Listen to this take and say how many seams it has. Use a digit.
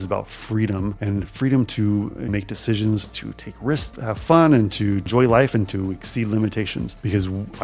4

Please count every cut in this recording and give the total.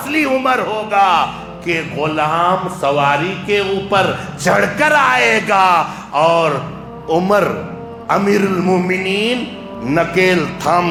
0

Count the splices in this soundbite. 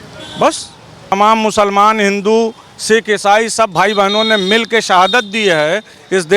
1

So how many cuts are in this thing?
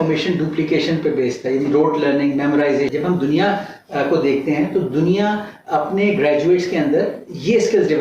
1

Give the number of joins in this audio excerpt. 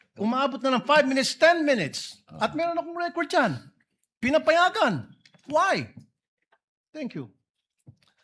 0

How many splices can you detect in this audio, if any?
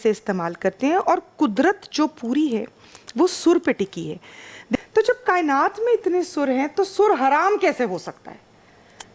1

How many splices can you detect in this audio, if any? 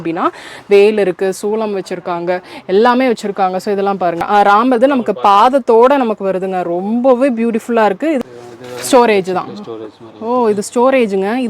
2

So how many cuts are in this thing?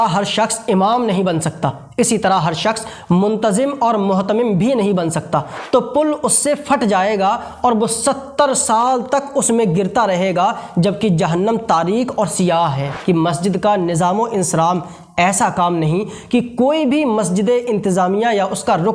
2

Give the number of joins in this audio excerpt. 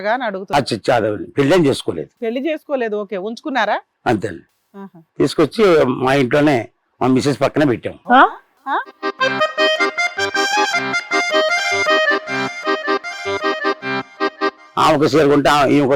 1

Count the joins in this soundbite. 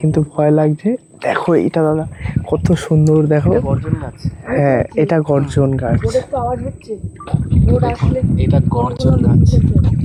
0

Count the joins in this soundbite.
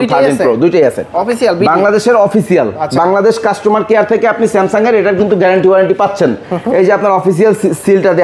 1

